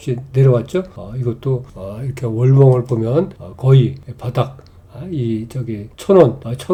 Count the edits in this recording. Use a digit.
0